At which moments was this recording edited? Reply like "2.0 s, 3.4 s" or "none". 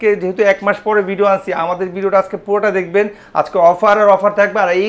none